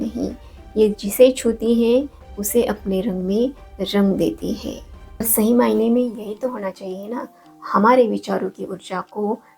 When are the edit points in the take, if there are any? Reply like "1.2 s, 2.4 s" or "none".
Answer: 5.3 s

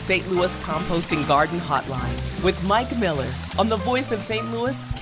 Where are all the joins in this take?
none

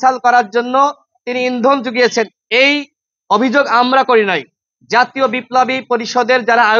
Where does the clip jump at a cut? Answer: none

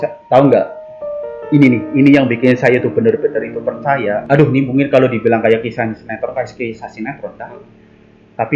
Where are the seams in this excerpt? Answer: 4.2 s

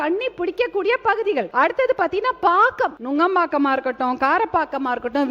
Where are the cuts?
1.5 s, 3.0 s

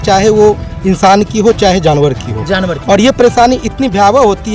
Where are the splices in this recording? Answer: none

